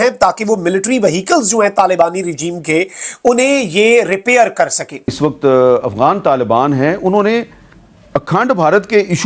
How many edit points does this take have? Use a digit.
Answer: 1